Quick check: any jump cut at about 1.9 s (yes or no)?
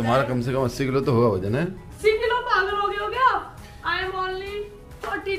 yes